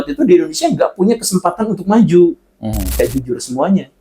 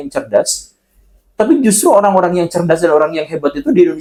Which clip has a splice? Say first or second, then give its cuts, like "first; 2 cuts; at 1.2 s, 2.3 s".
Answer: first; 1 cut; at 3.0 s